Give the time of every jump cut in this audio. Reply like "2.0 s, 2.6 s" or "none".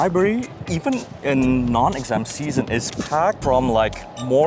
none